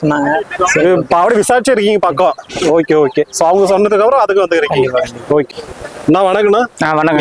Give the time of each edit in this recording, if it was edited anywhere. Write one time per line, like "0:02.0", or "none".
0:05.5